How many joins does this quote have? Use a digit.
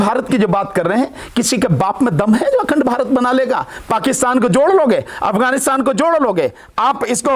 0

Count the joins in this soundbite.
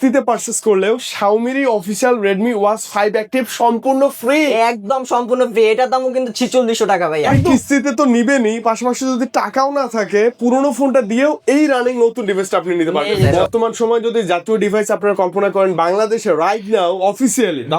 2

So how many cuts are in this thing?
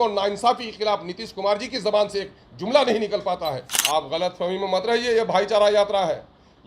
1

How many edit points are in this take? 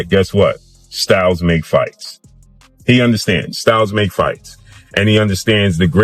0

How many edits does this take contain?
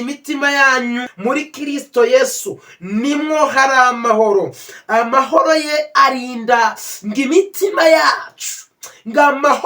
2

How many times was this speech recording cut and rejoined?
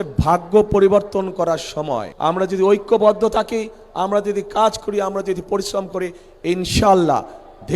1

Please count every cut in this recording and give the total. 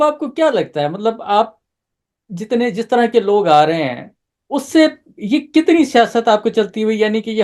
0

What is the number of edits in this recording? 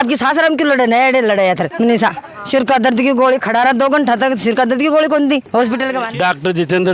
2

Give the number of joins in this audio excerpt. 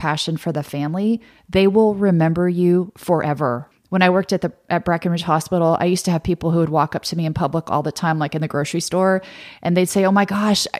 1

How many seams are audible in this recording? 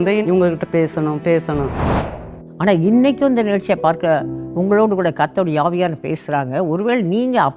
1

